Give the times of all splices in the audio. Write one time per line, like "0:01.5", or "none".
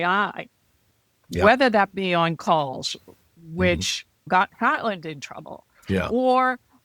0:01.2
0:04.3